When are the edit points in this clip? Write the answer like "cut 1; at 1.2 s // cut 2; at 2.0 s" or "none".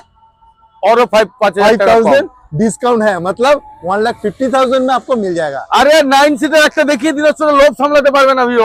none